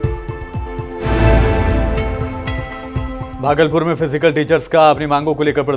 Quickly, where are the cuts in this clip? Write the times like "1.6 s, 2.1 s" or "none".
1.0 s